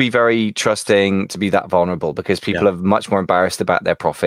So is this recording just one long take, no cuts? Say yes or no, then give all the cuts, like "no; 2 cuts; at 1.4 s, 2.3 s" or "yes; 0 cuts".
yes; 0 cuts